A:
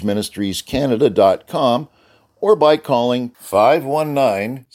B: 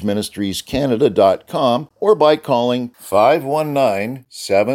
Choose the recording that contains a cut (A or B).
B